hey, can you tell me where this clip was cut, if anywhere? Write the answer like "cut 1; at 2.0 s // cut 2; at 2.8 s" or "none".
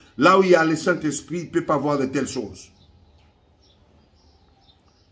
none